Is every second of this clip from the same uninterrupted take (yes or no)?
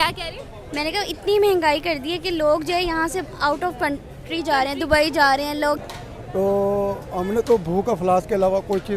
no